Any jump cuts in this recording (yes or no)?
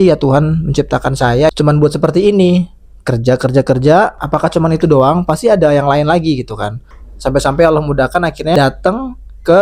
yes